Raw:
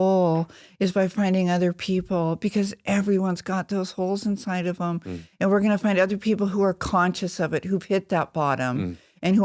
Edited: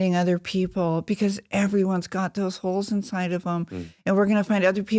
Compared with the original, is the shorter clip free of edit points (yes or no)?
yes